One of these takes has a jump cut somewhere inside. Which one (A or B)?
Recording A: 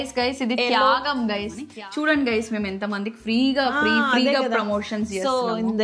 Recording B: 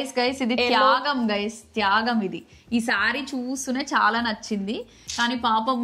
A